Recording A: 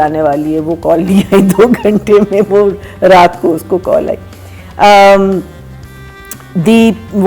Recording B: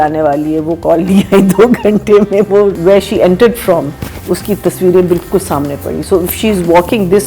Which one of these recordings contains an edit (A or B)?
B